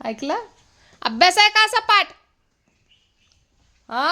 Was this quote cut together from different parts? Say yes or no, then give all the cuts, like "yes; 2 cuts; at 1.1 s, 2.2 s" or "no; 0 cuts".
no; 0 cuts